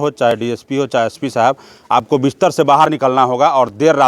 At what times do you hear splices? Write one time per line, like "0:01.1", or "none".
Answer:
none